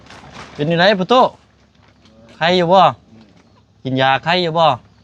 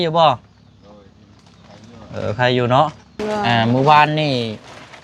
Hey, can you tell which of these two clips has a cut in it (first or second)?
second